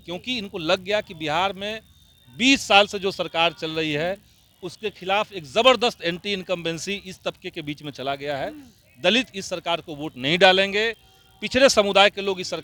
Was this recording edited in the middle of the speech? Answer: no; 0 cuts

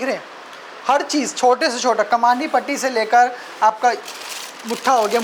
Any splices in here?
no; 0 cuts

